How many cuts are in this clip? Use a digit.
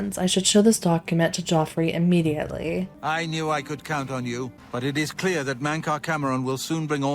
2